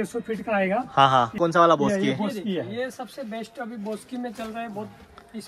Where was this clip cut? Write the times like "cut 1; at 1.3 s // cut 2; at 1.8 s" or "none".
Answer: cut 1; at 1.3 s